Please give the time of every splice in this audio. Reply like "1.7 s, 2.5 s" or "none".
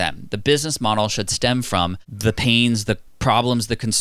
2.1 s, 3.1 s